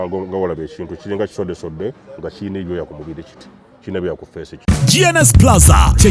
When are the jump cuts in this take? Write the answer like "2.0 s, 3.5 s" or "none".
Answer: 4.5 s